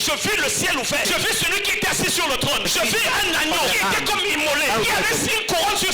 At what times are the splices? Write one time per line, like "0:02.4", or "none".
0:01.0
0:02.6
0:03.7
0:04.8